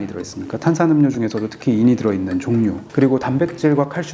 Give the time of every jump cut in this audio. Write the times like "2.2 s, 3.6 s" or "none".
2.8 s